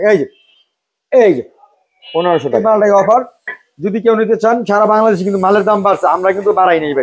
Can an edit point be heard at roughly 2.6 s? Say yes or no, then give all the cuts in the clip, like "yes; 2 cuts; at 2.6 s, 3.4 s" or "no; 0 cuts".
yes; 1 cut; at 2.6 s